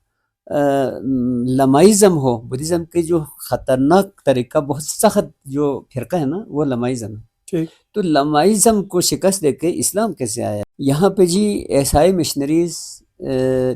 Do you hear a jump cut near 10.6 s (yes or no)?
yes